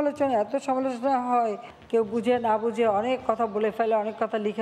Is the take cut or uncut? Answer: cut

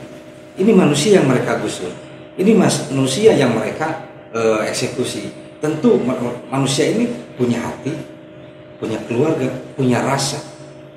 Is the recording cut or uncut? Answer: uncut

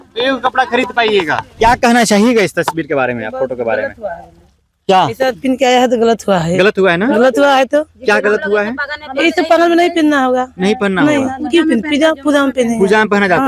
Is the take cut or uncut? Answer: cut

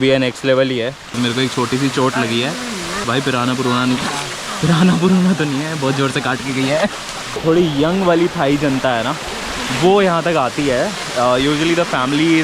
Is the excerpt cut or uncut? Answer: cut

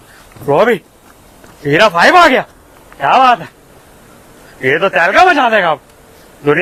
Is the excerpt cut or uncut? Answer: uncut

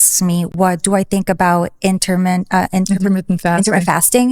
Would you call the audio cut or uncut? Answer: uncut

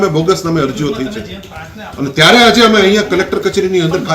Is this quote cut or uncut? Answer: uncut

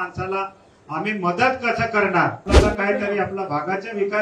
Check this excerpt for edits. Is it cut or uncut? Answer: cut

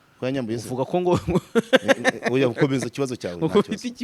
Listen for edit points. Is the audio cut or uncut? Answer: uncut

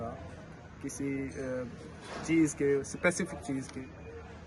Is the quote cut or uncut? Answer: uncut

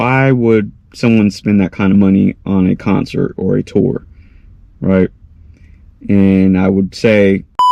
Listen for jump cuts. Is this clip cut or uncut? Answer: uncut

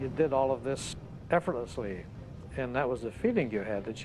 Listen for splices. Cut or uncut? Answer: cut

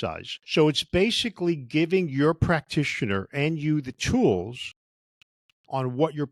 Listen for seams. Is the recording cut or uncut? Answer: uncut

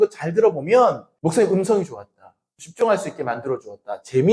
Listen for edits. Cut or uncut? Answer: cut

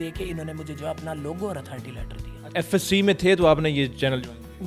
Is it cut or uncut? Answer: uncut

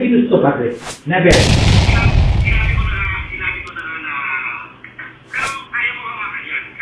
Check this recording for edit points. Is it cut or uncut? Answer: uncut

